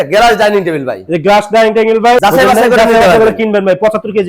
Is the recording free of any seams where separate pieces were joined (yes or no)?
no